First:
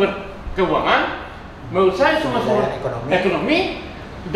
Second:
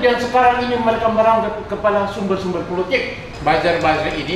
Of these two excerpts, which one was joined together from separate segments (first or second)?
second